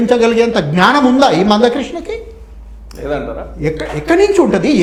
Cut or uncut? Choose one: uncut